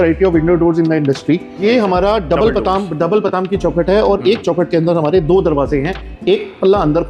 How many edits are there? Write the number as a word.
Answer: one